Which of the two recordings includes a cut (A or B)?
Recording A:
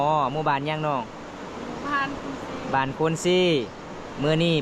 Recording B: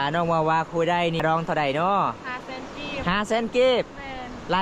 B